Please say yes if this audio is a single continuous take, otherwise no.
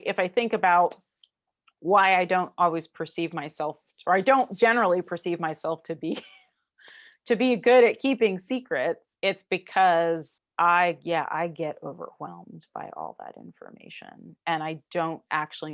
no